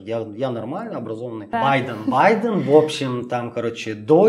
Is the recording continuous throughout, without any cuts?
no; 1 cut; at 1.5 s

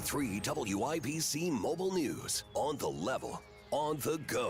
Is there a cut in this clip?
no; 0 cuts

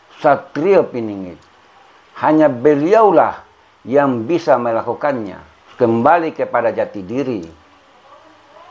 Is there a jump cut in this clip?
yes; 1 cut; at 5.7 s

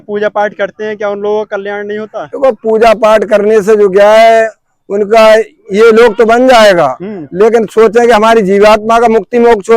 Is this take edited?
no; 0 cuts

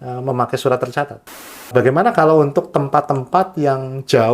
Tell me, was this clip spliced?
yes; 1 cut; at 1.2 s

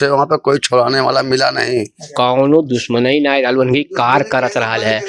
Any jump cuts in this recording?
yes; 1 cut; at 2.0 s

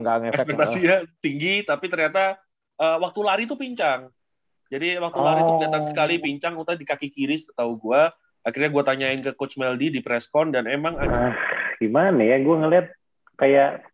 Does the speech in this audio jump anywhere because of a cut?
yes; 1 cut; at 11.0 s

